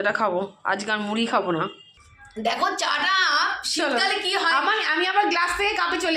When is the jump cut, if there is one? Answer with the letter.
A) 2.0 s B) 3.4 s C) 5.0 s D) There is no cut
A